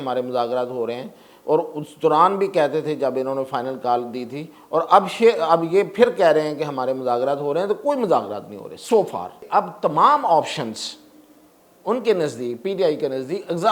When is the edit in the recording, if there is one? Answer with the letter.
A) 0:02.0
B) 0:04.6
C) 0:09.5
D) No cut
C